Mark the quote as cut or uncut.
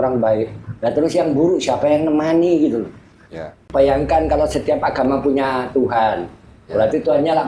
cut